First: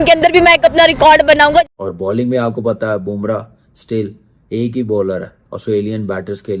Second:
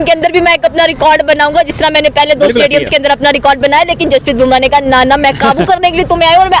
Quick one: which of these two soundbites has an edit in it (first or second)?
first